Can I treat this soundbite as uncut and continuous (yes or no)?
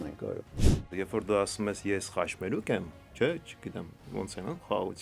no